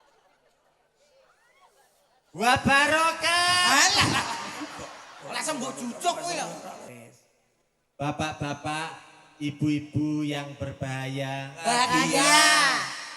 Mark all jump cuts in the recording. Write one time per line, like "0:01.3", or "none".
0:06.8